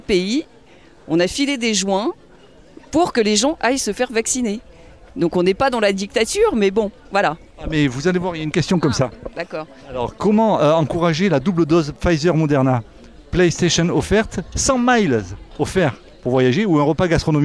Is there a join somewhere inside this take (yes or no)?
no